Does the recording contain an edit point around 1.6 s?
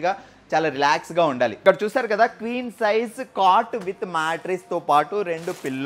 yes; 1 cut; at 1.6 s

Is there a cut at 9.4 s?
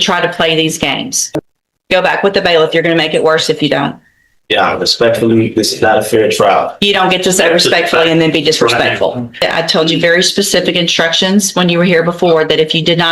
yes; 2 cuts; at 1.2 s, 9.4 s

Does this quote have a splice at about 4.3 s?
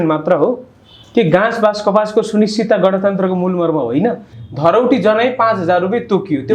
yes; 1 cut; at 4.3 s

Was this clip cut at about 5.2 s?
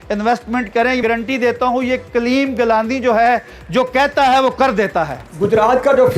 yes; 2 cuts; at 1.0 s, 5.2 s

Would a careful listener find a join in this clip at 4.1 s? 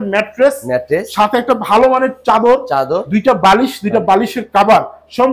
no; 0 cuts

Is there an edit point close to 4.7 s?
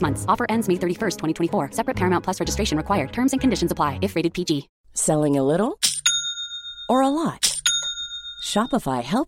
yes; 1 cut; at 4.7 s

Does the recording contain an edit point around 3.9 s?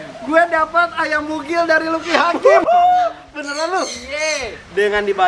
no; 1 cut; at 2.4 s

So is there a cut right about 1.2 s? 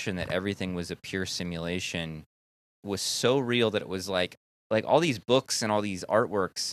no; 2 cuts; at 2.7 s, 4.3 s

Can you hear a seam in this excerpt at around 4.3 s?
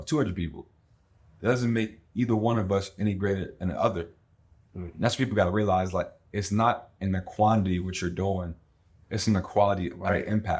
no; 0 cuts

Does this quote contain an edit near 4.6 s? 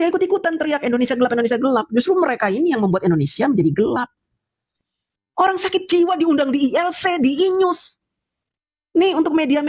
yes; 1 cut; at 4.6 s

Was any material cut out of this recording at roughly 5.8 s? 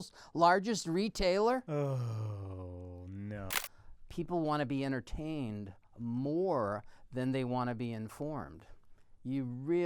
no; 2 cuts; at 1.7 s, 3.5 s

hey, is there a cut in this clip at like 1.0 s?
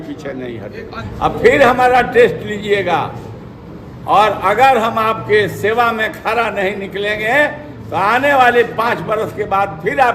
yes; 1 cut; at 1.0 s

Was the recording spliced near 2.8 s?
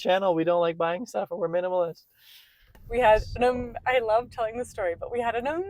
yes; 1 cut; at 2.8 s

